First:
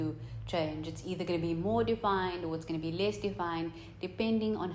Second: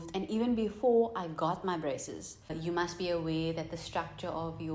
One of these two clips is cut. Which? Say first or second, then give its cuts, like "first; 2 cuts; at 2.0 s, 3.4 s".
second; 1 cut; at 2.5 s